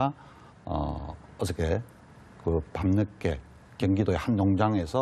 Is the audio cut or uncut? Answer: cut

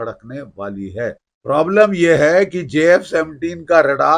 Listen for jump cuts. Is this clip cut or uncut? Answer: cut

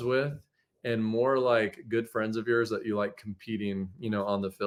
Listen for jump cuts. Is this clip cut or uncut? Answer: uncut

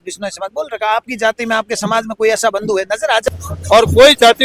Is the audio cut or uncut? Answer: cut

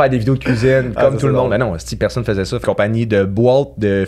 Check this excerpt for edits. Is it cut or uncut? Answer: cut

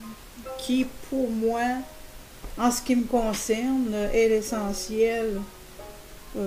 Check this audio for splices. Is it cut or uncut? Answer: uncut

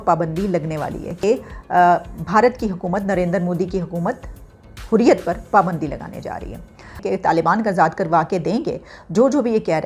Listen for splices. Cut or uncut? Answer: cut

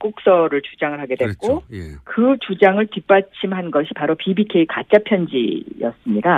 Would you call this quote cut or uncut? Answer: uncut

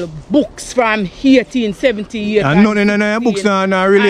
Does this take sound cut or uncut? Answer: uncut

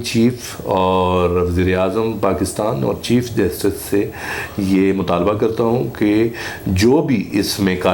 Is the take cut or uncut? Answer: uncut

